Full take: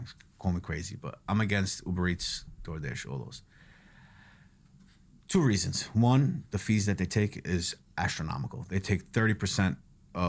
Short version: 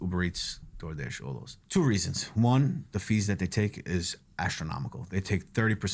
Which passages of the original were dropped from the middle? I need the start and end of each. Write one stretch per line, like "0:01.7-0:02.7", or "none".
0:03.4-0:05.1